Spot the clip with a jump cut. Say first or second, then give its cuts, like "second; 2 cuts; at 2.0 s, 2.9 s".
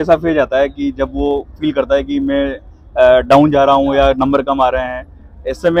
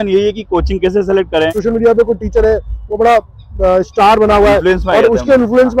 second; 1 cut; at 1.6 s